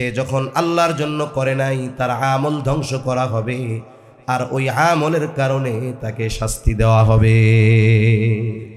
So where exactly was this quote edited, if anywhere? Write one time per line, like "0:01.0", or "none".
none

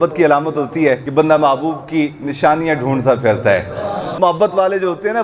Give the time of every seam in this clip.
0:01.0
0:04.1

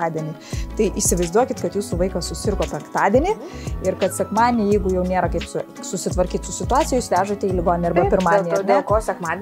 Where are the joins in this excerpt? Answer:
none

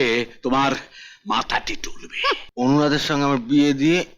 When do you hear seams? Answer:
0:02.5

